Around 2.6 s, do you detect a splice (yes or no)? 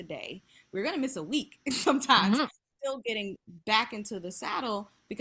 yes